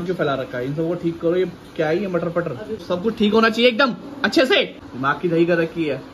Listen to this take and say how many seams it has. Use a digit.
2